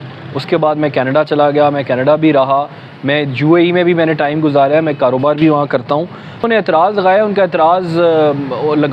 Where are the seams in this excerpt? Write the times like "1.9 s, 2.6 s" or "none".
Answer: 6.5 s